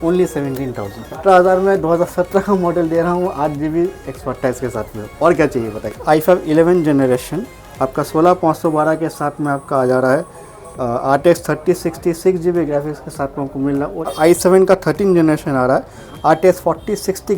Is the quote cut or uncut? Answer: cut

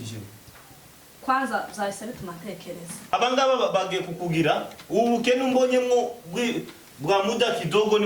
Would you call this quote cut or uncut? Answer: cut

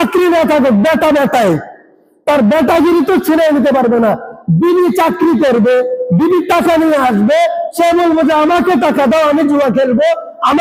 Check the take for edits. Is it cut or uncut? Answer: uncut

